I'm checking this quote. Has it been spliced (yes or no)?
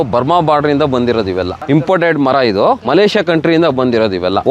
yes